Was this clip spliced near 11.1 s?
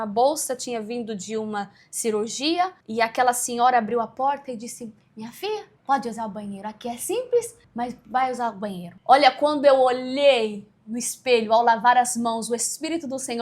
no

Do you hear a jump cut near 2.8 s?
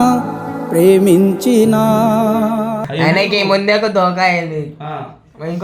yes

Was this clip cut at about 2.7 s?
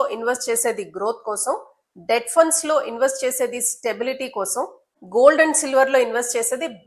no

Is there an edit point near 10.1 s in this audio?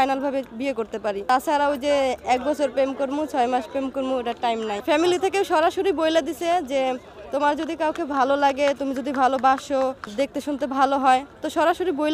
yes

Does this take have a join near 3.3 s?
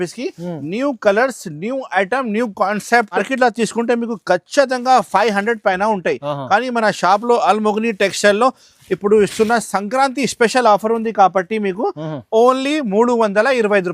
yes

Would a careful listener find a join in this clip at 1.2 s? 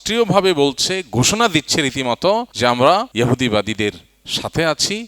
no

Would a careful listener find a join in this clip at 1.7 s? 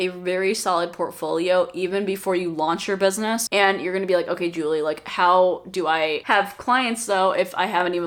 no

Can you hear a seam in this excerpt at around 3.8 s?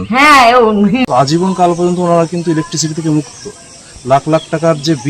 no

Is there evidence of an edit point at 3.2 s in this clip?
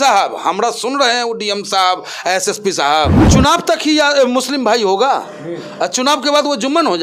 yes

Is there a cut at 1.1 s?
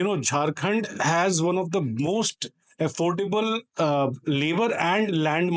no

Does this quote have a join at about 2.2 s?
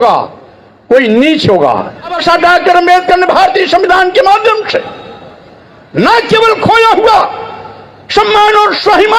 yes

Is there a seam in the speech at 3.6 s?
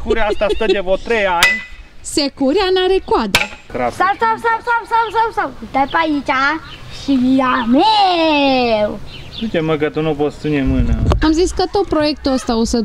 yes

